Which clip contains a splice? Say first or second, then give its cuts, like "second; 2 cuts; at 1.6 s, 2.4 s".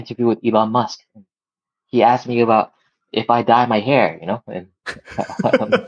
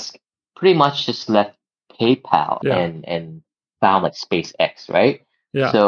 second; 1 cut; at 2.6 s